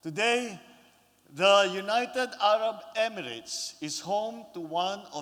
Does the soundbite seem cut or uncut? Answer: uncut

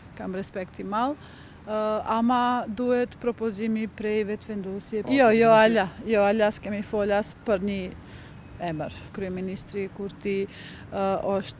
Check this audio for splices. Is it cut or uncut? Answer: cut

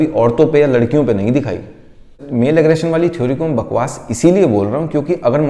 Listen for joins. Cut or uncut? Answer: uncut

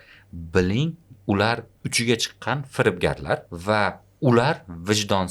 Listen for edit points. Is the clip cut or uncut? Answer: cut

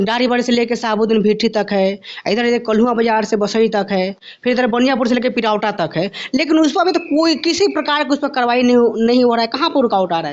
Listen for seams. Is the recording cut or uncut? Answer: uncut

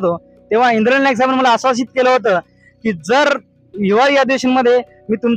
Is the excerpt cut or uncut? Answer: uncut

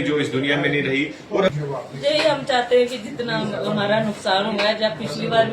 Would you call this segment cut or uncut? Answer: cut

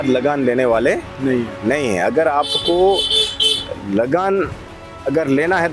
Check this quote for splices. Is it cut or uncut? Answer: uncut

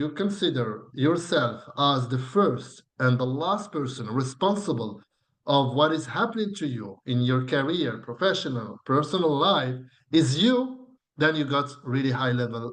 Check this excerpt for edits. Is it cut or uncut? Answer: uncut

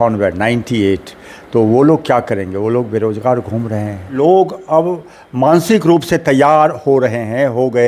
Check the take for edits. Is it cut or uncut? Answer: cut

